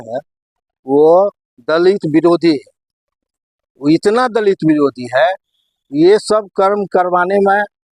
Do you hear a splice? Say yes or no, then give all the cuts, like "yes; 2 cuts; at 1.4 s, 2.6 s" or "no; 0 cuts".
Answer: no; 0 cuts